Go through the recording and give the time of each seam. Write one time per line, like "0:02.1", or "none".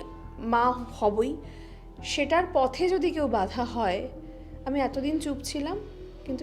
none

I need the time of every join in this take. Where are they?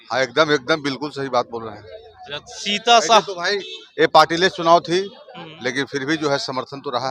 none

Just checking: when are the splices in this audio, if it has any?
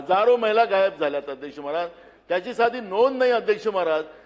none

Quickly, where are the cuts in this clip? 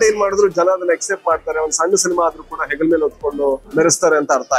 0:03.6

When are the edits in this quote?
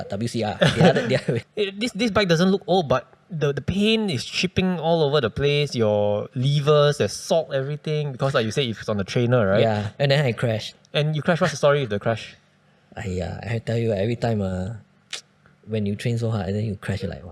0:01.5

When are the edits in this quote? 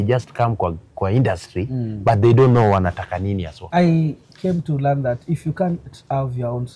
0:03.6

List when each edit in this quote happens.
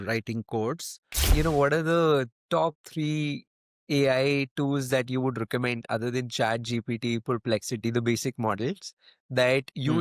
0:01.3

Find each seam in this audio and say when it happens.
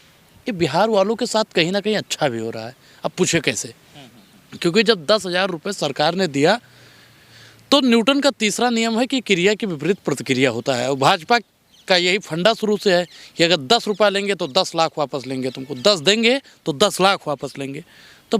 none

